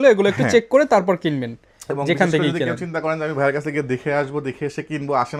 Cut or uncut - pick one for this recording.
uncut